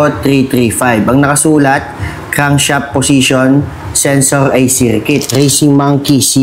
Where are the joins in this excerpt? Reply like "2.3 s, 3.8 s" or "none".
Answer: 5.3 s